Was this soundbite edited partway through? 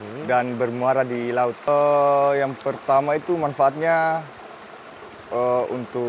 yes; 1 cut; at 1.7 s

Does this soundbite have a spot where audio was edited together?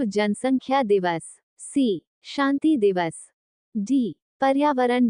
no; 0 cuts

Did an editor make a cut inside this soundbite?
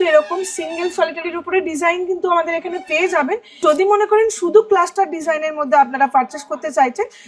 yes; 1 cut; at 3.6 s

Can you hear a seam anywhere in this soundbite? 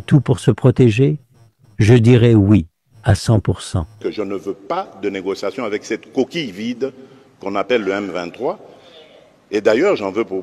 yes; 1 cut; at 4.0 s

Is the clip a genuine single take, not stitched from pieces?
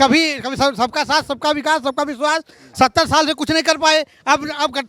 yes; 0 cuts

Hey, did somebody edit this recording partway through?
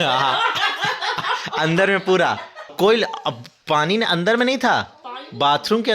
yes; 1 cut; at 2.7 s

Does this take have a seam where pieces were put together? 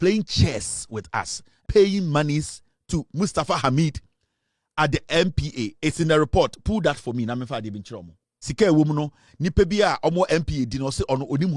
yes; 2 cuts; at 1.6 s, 8.5 s

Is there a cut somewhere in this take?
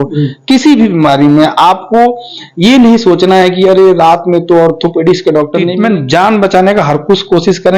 yes; 1 cut; at 5.7 s

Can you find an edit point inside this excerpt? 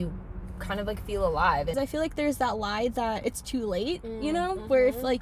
yes; 2 cuts; at 1.8 s, 3.2 s

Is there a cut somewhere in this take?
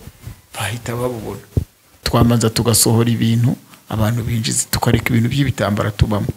yes; 1 cut; at 2.0 s

